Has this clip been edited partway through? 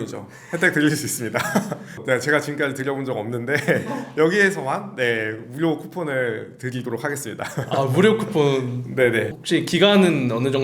yes; 1 cut; at 9.4 s

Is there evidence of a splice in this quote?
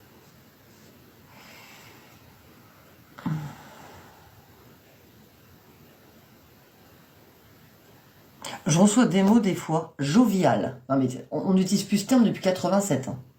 no; 0 cuts

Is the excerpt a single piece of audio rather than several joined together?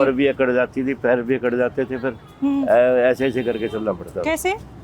yes; 0 cuts

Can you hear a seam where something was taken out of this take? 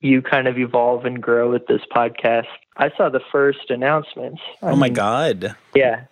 yes; 1 cut; at 2.6 s

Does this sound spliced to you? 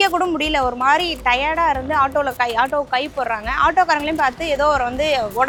no; 0 cuts

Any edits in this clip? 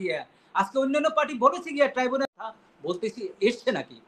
yes; 1 cut; at 2.2 s

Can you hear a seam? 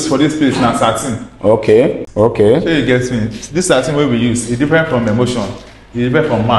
yes; 1 cut; at 2.0 s

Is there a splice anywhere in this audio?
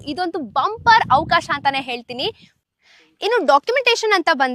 yes; 1 cut; at 2.5 s

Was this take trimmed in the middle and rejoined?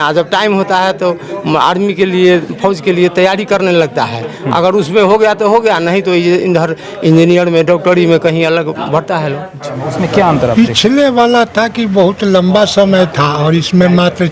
yes; 1 cut; at 9.9 s

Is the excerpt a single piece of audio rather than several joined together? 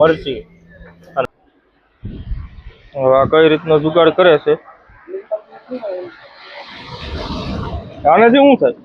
no; 1 cut; at 1.2 s

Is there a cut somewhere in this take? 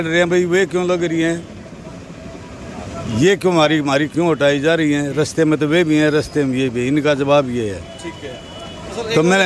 no; 0 cuts

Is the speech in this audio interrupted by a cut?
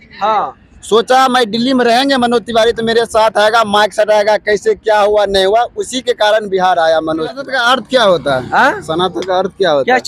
yes; 1 cut; at 7.4 s

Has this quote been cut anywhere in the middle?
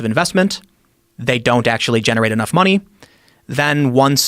yes; 1 cut; at 2.5 s

